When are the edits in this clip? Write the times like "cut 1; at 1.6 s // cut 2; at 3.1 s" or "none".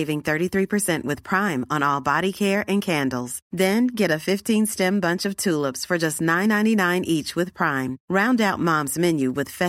none